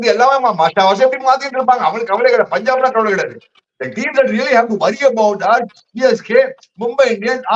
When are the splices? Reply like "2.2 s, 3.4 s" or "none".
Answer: none